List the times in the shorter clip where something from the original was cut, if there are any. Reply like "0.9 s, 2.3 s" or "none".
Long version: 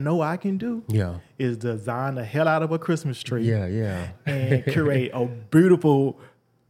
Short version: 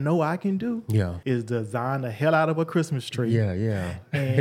1.2 s